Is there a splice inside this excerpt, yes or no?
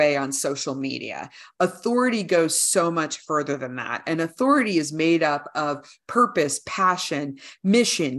no